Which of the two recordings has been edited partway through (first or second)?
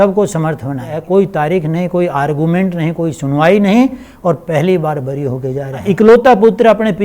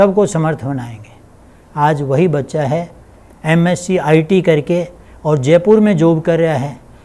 first